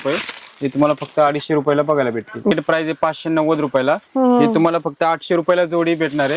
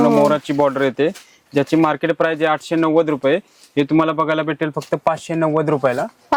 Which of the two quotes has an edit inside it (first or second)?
first